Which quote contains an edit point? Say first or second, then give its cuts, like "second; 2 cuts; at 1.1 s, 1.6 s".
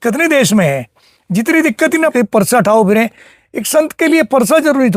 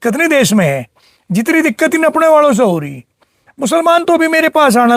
first; 1 cut; at 2.1 s